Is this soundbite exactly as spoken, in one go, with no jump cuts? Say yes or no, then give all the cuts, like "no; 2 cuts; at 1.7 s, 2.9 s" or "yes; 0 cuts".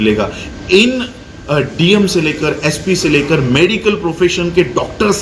yes; 0 cuts